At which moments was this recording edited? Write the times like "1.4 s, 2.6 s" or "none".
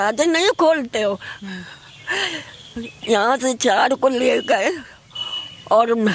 1.3 s

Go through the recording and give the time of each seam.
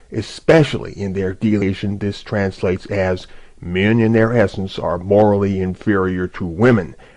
none

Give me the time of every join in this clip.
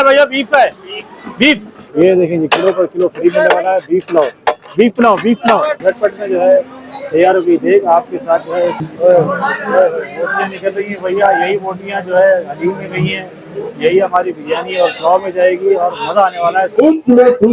1.8 s, 5.8 s, 8.8 s, 16.7 s

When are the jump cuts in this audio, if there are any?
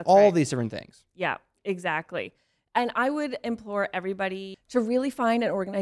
4.5 s

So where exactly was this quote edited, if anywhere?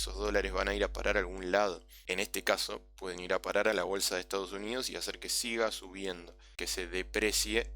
1.9 s, 6.5 s

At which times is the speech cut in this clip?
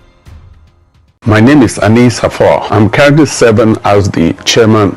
1.0 s

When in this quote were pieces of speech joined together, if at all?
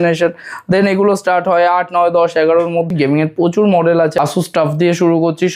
2.9 s, 4.1 s

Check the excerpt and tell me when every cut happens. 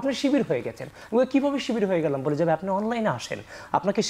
none

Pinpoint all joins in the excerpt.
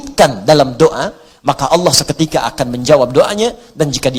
none

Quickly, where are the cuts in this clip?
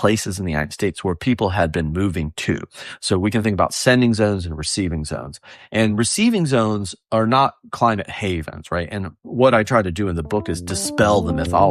none

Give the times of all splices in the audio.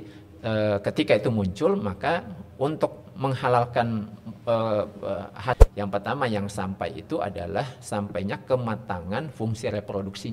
5.6 s

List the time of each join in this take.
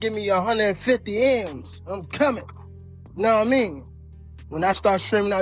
none

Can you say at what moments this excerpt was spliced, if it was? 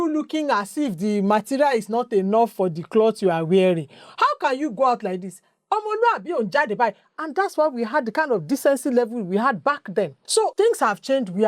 10.4 s

